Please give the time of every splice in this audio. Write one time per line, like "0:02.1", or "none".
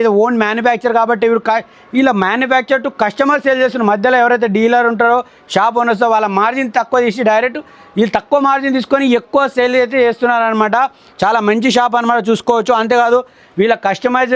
none